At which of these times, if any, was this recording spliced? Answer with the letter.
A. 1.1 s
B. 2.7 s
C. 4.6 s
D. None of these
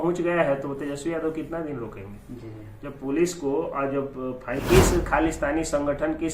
C